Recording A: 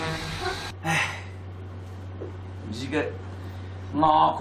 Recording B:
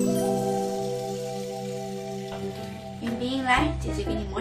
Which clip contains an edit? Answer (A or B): A